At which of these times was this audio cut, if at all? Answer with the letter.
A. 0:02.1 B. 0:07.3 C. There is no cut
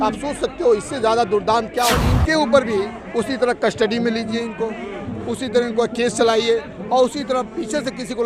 A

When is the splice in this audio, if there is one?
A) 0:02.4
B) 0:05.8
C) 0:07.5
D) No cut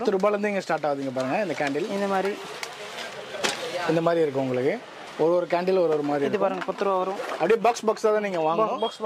D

